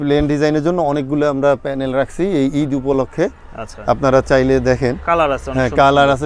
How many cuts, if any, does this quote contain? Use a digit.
0